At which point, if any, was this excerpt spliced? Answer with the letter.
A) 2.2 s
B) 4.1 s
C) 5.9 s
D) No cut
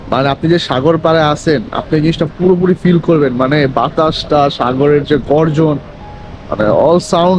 D